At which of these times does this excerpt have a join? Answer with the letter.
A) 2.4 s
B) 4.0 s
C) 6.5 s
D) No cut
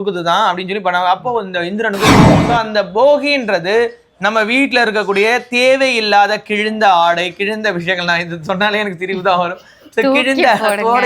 A